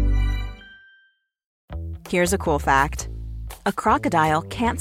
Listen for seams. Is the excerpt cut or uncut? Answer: cut